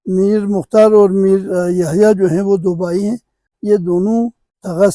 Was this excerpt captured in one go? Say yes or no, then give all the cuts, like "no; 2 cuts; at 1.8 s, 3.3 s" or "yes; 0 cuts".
no; 2 cuts; at 1.5 s, 3.5 s